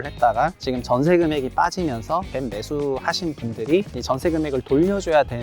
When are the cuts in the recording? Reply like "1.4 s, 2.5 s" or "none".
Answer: 2.3 s, 4.0 s